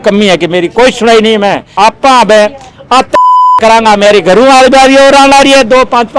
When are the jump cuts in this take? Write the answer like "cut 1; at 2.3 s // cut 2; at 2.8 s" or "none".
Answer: cut 1; at 1.7 s